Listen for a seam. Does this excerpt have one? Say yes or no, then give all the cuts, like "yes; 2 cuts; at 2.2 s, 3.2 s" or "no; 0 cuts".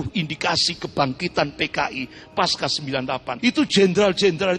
yes; 1 cut; at 3.3 s